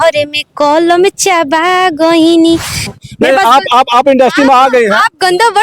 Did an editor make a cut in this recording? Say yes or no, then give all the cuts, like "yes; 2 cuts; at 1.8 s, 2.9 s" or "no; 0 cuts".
yes; 1 cut; at 2.9 s